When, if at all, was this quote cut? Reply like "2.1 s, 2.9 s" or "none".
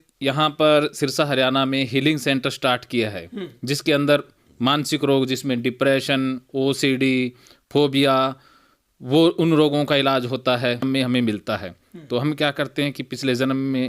10.8 s